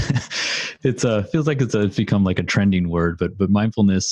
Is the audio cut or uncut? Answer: uncut